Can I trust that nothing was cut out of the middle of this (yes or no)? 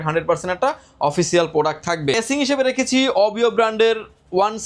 yes